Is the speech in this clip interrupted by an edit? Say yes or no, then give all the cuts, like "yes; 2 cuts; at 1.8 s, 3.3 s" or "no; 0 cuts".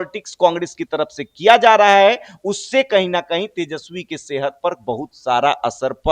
no; 0 cuts